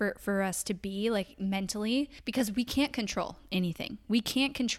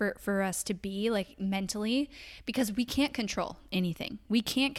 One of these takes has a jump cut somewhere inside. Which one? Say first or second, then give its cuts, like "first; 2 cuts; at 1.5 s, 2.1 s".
first; 1 cut; at 2.2 s